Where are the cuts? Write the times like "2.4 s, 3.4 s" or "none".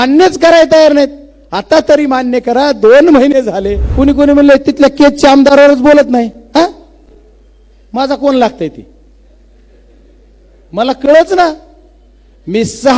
3.8 s